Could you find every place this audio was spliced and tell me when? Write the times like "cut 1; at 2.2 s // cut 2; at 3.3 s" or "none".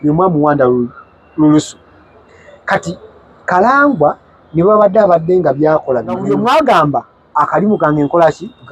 cut 1; at 6.2 s